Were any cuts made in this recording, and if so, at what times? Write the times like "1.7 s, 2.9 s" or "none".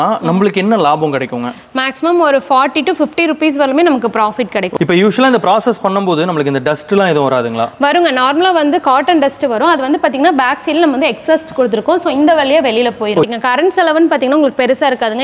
4.8 s, 13.2 s